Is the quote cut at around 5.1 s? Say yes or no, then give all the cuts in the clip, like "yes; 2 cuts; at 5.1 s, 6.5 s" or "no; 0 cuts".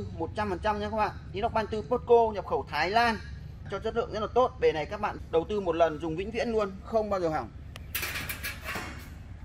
yes; 2 cuts; at 3.7 s, 5.1 s